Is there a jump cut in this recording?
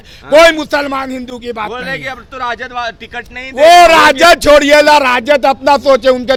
no; 0 cuts

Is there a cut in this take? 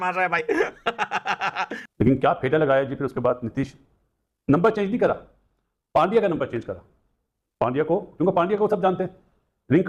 no; 0 cuts

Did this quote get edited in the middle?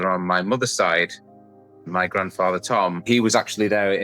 yes; 1 cut; at 3.1 s

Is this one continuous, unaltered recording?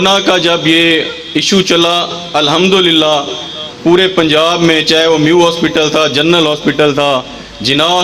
yes; 0 cuts

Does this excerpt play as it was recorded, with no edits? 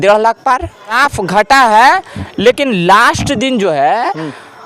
no; 1 cut; at 1.0 s

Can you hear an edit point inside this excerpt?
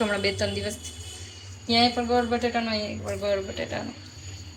no; 0 cuts

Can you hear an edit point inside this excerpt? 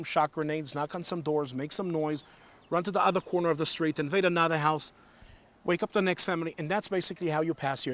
no; 0 cuts

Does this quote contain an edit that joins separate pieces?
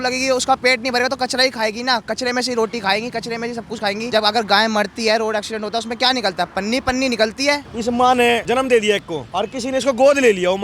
yes; 4 cuts; at 4.1 s, 7.7 s, 8.4 s, 9.2 s

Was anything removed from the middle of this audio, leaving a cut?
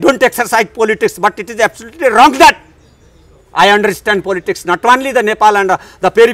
no; 0 cuts

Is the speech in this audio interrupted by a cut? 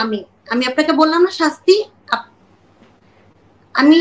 no; 0 cuts

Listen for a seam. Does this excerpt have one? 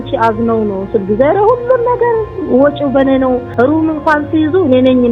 yes; 1 cut; at 3.5 s

